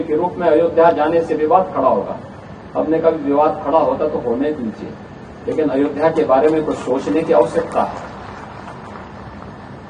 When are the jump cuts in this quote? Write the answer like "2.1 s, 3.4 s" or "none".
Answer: none